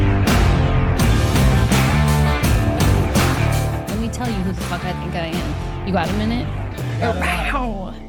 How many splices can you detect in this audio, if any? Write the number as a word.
zero